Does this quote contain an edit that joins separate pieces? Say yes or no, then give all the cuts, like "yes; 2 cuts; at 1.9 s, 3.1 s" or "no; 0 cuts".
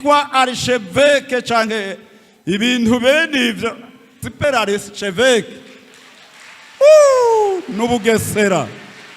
yes; 1 cut; at 4.2 s